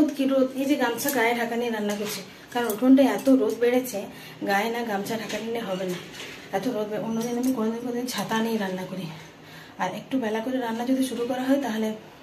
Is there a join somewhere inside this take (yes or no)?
no